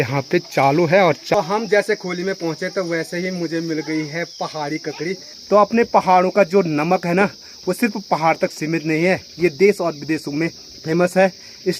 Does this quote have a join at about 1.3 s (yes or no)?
yes